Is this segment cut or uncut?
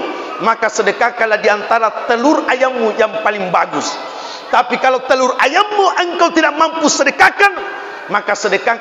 uncut